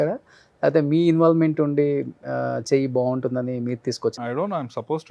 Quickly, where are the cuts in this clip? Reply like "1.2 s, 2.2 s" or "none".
4.2 s